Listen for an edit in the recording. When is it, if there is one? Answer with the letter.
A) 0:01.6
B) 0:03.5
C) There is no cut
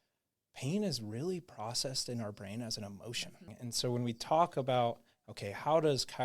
B